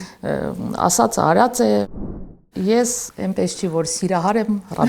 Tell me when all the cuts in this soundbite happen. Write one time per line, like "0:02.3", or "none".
0:02.3
0:03.0